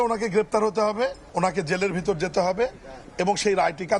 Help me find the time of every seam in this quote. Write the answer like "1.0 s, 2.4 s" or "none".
1.2 s

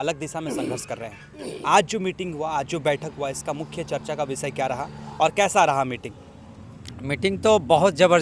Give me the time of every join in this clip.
none

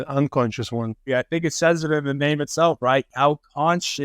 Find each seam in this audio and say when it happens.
1.1 s, 3.1 s

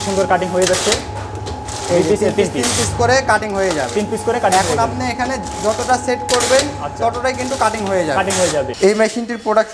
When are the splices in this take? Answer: 8.7 s

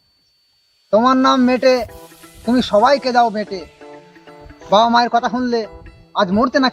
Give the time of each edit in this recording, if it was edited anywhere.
none

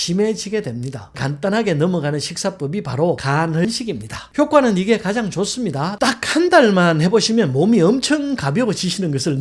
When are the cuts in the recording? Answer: 1.1 s, 3.6 s

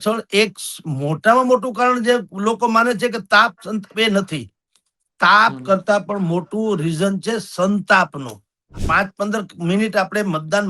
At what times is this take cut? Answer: 8.8 s

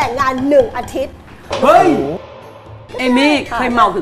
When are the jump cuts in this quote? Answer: 2.4 s

